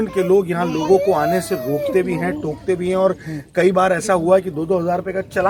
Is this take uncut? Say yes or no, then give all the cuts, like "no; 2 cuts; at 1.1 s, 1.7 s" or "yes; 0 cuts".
yes; 0 cuts